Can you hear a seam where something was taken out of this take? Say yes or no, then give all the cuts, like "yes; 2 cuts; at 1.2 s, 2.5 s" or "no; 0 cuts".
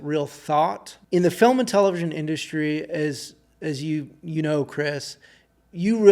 yes; 1 cut; at 0.9 s